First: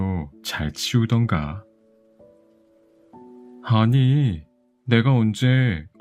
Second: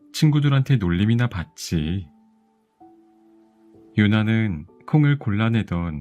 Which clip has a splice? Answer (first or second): second